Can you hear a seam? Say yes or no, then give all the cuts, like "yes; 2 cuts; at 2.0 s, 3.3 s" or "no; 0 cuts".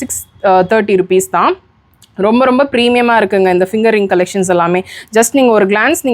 no; 0 cuts